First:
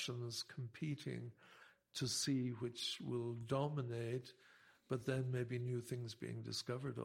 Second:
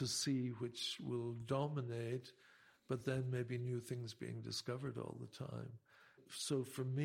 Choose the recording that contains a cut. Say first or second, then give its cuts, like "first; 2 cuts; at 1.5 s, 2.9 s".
second; 1 cut; at 6.2 s